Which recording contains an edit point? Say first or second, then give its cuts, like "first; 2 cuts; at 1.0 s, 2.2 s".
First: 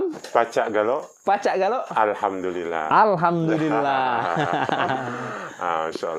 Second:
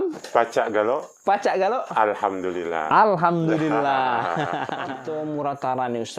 second; 1 cut; at 4.9 s